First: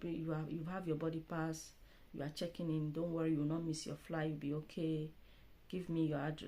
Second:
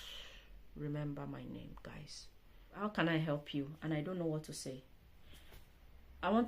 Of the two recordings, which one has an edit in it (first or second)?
second